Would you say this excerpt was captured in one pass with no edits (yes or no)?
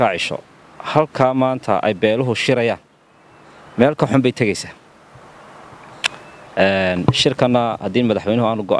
yes